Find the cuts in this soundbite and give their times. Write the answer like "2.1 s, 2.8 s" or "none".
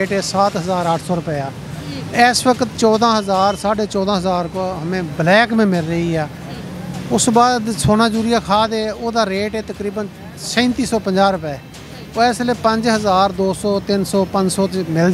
none